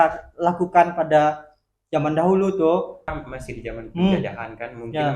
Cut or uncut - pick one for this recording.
cut